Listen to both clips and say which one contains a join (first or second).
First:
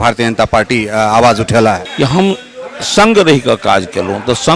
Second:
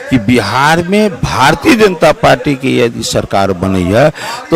first